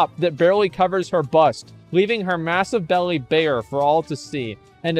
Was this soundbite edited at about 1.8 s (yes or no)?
no